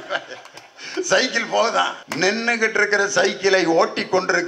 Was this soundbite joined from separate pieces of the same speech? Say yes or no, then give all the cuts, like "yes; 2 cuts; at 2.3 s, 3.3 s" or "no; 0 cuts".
yes; 1 cut; at 2.0 s